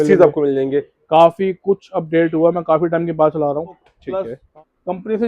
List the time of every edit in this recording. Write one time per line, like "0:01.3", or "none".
0:03.9